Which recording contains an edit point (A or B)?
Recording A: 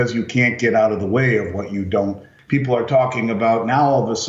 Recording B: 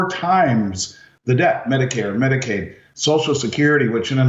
A